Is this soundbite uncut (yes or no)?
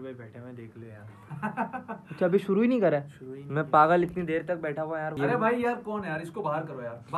no